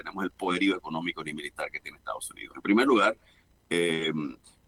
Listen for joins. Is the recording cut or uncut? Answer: uncut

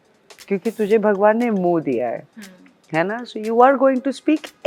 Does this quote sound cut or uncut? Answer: uncut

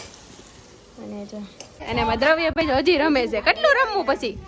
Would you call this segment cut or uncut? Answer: cut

